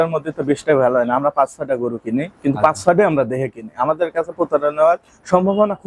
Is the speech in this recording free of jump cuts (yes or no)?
yes